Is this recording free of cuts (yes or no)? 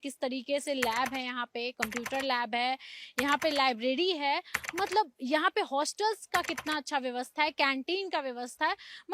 yes